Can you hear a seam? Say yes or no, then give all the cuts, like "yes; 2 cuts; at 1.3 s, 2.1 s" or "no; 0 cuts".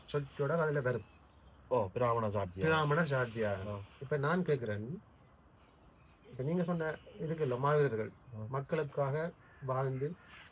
no; 0 cuts